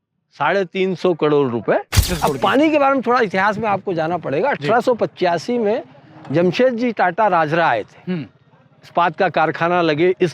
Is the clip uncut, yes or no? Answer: no